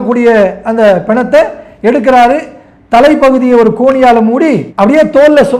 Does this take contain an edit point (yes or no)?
no